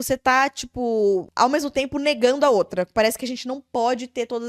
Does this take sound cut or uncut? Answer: cut